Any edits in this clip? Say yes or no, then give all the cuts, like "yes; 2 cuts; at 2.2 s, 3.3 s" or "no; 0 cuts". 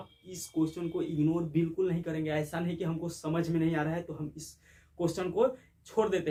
no; 0 cuts